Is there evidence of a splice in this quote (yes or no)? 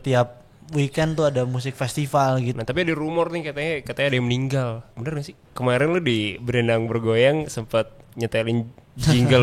yes